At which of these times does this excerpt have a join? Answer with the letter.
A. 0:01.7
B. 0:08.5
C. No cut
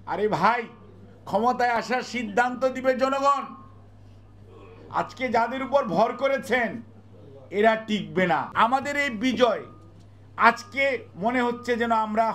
B